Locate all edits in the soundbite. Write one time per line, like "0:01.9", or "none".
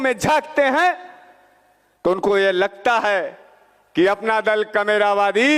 none